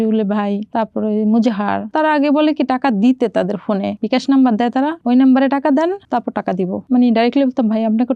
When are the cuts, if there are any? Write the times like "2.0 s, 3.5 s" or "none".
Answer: none